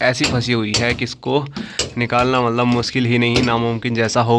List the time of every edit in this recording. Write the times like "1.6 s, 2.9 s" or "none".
none